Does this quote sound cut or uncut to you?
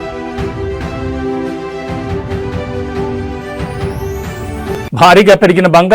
cut